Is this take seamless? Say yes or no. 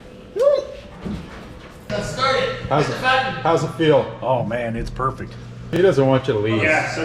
no